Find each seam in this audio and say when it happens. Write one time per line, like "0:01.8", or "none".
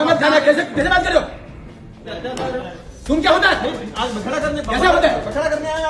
none